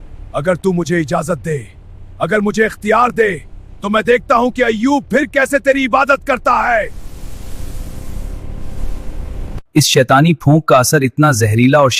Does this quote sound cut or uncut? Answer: cut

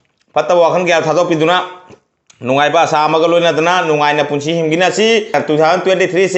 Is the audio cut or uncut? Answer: cut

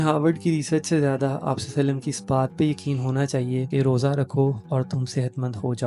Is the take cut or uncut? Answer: cut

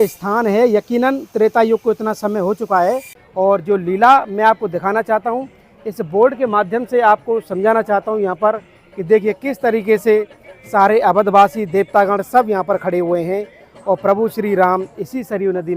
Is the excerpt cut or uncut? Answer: cut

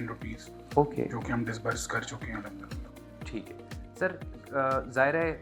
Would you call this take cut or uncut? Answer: uncut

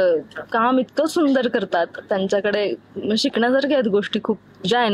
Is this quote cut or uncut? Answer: uncut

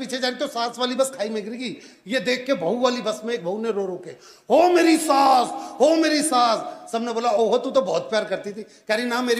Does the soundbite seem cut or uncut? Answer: uncut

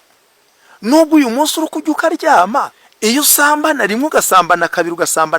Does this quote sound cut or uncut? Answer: cut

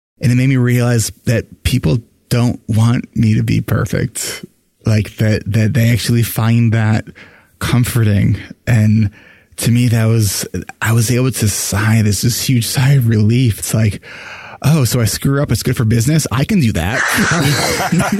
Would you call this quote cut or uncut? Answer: uncut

